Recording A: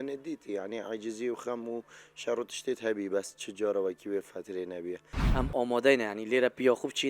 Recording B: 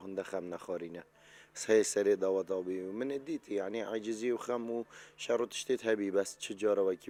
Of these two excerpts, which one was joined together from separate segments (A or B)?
A